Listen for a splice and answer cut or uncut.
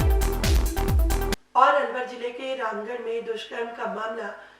cut